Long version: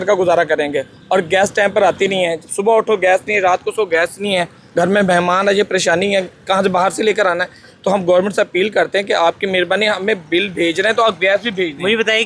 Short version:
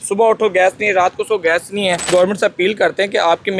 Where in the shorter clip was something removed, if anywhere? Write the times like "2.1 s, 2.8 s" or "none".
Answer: 2.1 s